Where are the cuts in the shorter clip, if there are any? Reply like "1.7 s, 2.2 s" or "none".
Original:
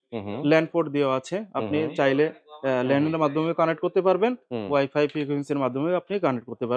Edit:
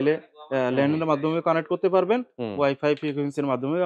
none